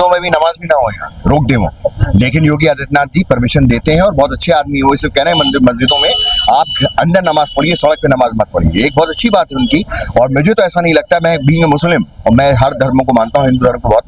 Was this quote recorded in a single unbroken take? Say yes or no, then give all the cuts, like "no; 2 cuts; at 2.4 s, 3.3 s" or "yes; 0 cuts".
yes; 0 cuts